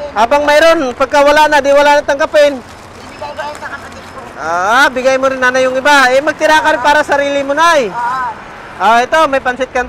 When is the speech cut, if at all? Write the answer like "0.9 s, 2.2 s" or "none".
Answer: none